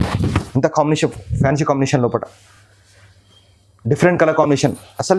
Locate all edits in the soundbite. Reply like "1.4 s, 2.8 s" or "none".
none

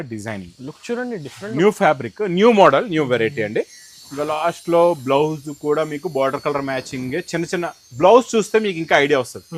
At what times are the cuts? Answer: none

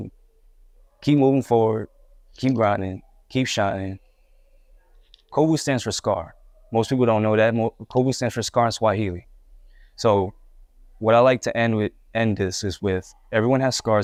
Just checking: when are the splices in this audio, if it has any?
none

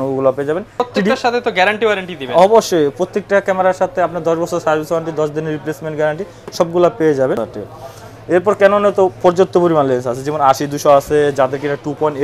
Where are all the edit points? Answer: 0.8 s, 7.5 s

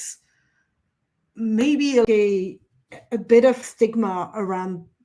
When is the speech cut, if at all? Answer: 2.1 s, 3.6 s

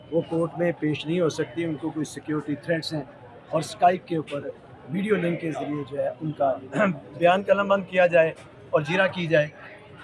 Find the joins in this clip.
none

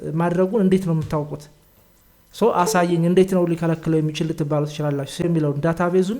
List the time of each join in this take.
5.2 s

